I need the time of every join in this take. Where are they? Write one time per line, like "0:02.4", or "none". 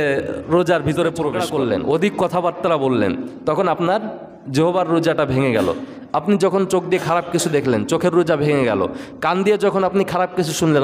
0:01.4